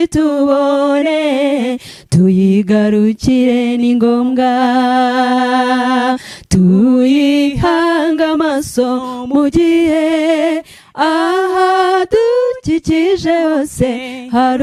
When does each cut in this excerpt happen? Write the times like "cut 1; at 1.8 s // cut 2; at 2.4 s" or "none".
none

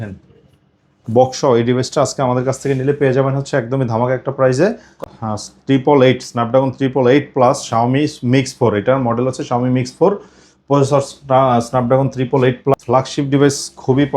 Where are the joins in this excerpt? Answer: cut 1; at 5.1 s // cut 2; at 12.7 s

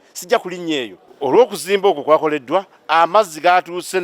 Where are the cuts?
cut 1; at 1.0 s

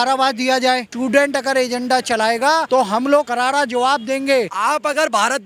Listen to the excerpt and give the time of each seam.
cut 1; at 0.9 s // cut 2; at 2.7 s // cut 3; at 3.3 s // cut 4; at 4.5 s

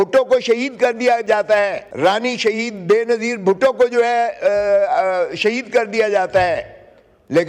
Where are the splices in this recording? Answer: cut 1; at 1.9 s

